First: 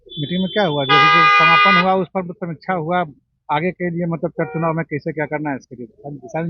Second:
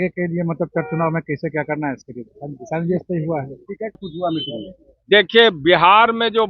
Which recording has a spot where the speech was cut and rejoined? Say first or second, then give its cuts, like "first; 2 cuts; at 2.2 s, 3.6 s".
second; 1 cut; at 4.0 s